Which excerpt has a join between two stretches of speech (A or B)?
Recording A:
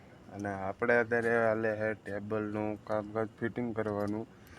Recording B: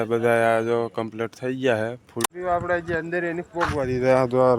B